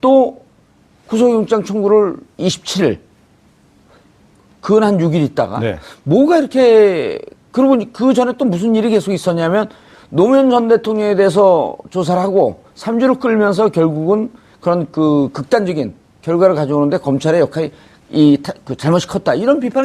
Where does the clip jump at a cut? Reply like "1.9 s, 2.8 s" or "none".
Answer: 18.8 s